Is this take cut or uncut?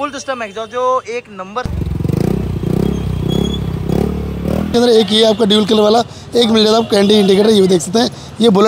cut